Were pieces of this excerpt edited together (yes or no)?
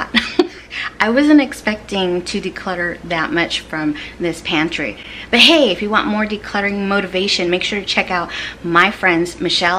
no